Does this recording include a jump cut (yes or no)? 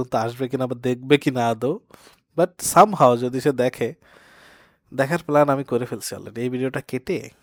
no